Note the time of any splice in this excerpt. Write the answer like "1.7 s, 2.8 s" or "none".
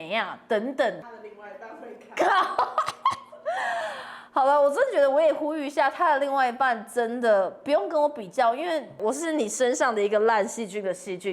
1.0 s, 9.0 s